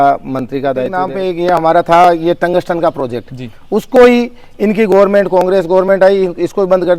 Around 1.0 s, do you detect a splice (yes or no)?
yes